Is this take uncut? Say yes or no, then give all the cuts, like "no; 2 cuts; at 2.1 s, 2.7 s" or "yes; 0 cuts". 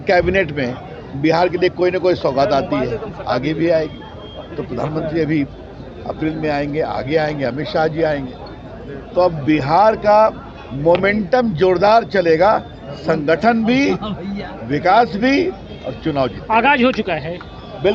yes; 0 cuts